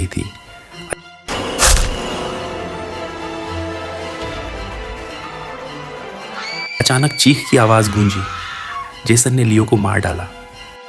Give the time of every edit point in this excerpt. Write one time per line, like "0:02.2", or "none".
none